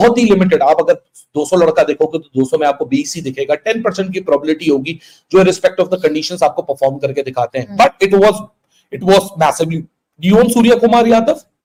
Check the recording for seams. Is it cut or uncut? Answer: uncut